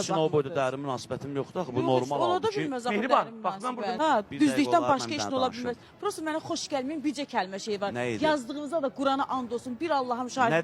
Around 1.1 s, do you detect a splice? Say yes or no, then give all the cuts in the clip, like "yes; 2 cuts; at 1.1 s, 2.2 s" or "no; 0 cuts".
no; 1 cut; at 4.0 s